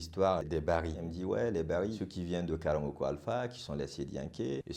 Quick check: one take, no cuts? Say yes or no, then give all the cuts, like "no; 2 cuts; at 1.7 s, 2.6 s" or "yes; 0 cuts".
no; 1 cut; at 1.0 s